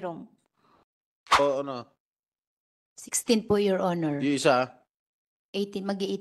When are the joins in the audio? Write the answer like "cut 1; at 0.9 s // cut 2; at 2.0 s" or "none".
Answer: cut 1; at 1.4 s